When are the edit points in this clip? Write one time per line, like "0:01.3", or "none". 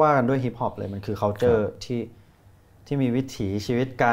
none